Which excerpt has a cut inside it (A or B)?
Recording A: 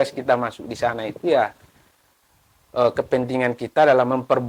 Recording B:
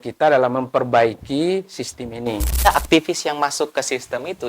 B